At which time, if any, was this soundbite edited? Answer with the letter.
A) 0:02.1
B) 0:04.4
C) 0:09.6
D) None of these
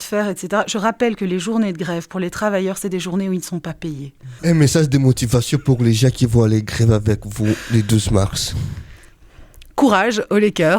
B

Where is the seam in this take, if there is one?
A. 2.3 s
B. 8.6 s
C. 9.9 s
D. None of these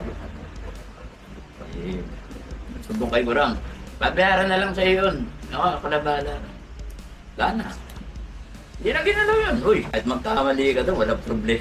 C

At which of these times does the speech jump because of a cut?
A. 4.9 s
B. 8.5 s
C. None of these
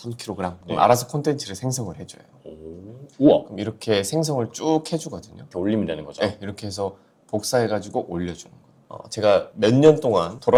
C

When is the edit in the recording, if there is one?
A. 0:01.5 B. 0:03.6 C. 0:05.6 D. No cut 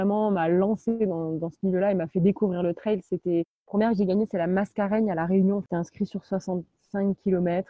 C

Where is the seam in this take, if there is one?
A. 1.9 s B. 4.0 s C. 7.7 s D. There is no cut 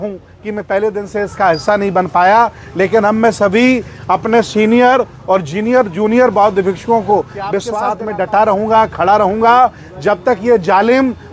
C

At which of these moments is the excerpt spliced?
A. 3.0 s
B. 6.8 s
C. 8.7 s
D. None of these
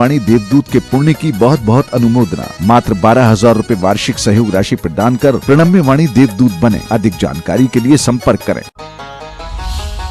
C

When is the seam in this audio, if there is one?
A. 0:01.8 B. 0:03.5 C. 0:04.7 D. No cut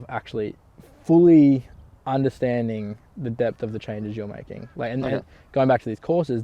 D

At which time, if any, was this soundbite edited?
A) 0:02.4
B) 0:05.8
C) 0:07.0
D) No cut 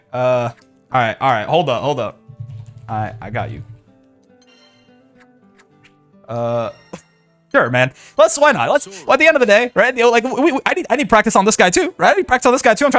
D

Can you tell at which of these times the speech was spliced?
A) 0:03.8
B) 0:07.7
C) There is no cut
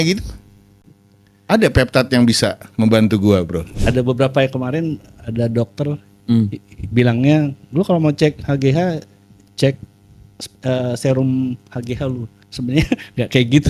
A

